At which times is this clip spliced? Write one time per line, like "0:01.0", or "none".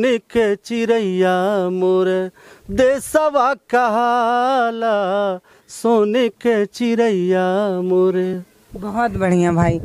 none